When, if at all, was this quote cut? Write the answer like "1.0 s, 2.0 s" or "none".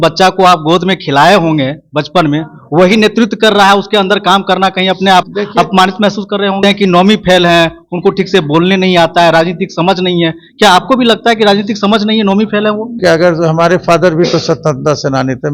6.6 s, 13.0 s